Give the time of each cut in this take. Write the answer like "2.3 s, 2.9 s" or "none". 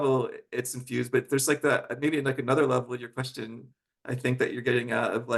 none